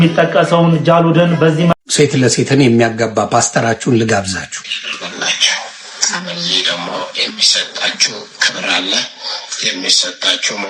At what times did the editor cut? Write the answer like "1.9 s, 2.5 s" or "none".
1.7 s